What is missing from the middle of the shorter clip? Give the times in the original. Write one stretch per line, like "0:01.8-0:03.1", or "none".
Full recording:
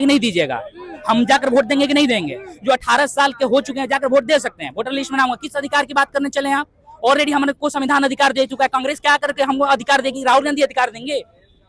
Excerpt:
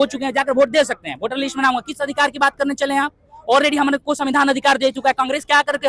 none